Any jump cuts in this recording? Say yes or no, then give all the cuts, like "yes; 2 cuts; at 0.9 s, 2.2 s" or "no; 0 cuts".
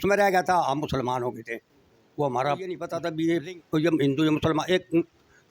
yes; 1 cut; at 3.0 s